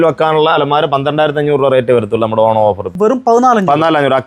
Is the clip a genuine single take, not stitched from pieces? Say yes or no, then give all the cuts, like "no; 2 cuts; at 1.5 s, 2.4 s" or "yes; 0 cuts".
no; 1 cut; at 2.9 s